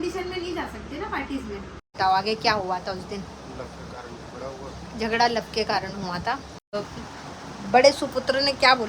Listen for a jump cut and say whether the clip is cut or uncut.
cut